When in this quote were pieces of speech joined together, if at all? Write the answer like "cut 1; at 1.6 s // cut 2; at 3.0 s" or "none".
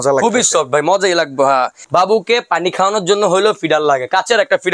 cut 1; at 1.8 s